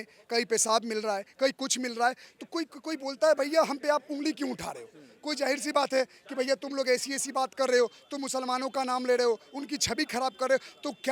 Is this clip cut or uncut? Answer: uncut